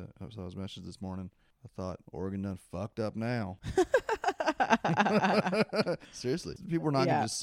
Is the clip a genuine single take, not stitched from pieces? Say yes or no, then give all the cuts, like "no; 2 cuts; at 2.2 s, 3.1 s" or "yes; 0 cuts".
no; 3 cuts; at 2.0 s, 3.6 s, 6.5 s